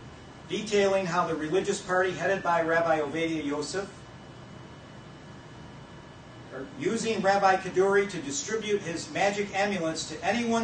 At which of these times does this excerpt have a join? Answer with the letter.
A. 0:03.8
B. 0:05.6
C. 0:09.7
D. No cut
C